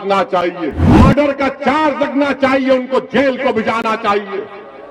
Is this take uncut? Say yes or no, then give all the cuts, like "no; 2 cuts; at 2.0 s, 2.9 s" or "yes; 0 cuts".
no; 1 cut; at 0.9 s